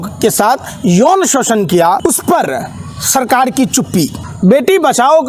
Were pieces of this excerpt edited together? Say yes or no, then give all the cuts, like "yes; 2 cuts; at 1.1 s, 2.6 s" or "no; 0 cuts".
yes; 2 cuts; at 2.0 s, 4.2 s